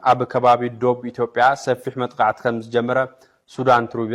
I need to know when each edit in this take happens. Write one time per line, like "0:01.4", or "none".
none